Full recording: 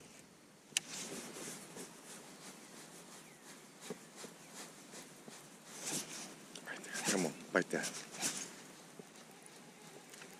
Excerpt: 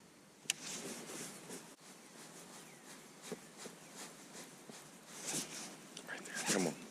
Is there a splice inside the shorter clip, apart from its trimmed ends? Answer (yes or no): yes